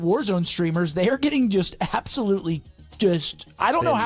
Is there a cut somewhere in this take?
no; 0 cuts

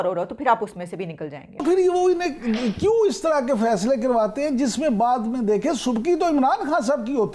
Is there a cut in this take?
yes; 1 cut; at 1.6 s

